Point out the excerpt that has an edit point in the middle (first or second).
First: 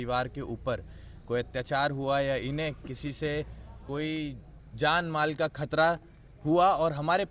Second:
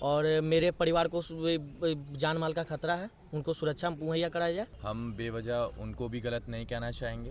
second